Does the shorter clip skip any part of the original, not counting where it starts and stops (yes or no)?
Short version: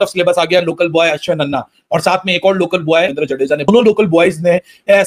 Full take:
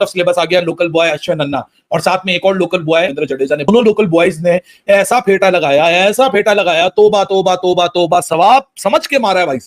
no